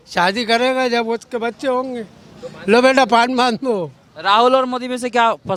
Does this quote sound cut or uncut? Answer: uncut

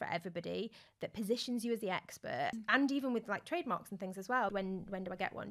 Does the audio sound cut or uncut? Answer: cut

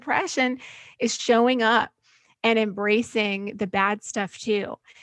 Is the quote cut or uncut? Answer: uncut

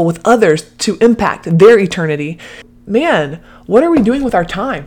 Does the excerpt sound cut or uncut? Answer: cut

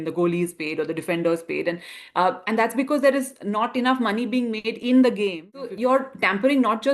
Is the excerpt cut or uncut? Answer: cut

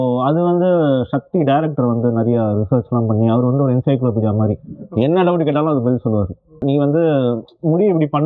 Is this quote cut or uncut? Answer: cut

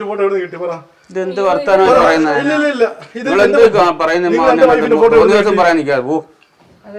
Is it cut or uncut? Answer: uncut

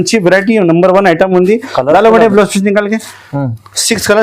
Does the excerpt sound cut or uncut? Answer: uncut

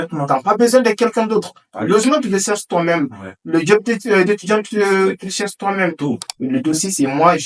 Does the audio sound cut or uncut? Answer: cut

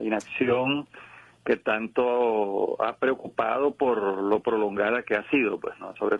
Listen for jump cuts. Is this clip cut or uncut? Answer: cut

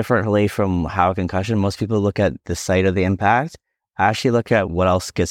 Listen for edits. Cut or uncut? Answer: uncut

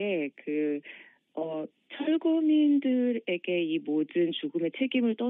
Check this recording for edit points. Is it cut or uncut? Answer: cut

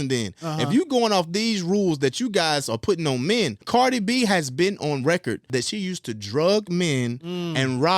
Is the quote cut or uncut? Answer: cut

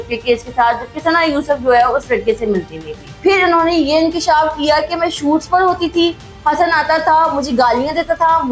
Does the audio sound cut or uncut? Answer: cut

